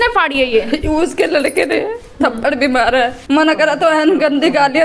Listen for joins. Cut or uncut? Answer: cut